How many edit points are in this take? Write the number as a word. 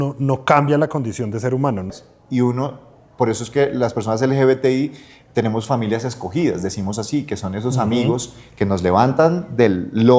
one